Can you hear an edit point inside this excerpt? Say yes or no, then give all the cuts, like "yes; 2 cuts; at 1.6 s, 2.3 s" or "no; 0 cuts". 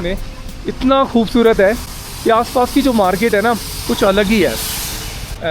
no; 0 cuts